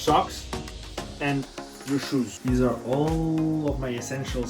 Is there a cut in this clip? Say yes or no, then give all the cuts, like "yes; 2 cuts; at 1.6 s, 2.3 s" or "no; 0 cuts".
yes; 1 cut; at 2.4 s